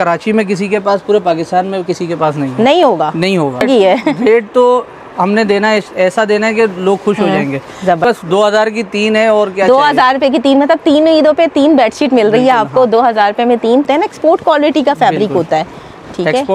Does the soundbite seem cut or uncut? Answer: cut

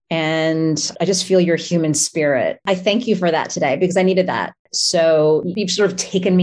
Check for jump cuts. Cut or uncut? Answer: cut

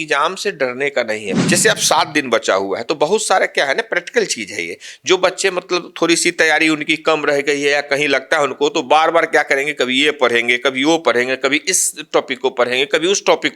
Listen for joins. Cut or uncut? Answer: cut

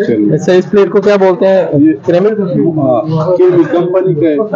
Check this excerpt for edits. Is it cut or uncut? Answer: uncut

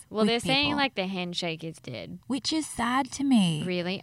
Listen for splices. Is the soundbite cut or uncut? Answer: uncut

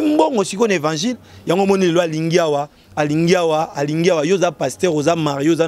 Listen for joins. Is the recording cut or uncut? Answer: uncut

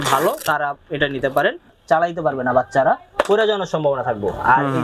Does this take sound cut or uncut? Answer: cut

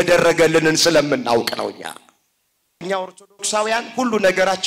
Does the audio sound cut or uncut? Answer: cut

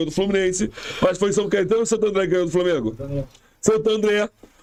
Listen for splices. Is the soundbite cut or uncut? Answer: uncut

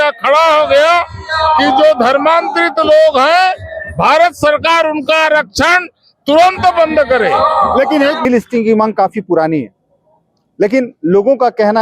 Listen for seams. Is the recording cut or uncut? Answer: cut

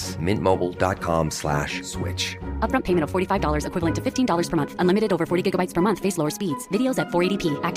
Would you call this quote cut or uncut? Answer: uncut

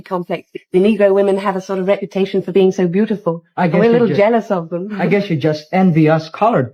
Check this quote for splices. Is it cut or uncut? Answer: uncut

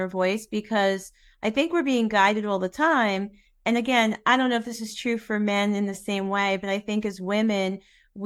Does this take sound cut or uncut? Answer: uncut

